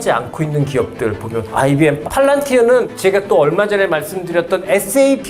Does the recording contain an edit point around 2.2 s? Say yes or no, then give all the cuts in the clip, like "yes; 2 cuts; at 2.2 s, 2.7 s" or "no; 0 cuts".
yes; 2 cuts; at 2.2 s, 2.9 s